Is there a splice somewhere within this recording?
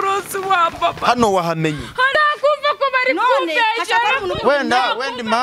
yes; 1 cut; at 2.1 s

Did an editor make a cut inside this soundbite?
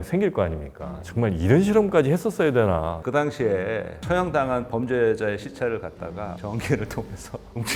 yes; 2 cuts; at 1.0 s, 3.0 s

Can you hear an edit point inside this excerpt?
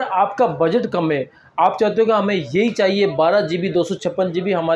no; 0 cuts

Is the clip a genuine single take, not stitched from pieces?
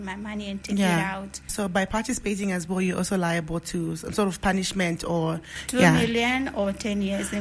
no; 1 cut; at 1.5 s

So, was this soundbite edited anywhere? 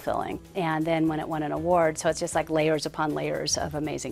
no; 0 cuts

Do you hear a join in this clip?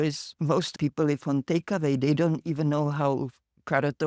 no; 0 cuts

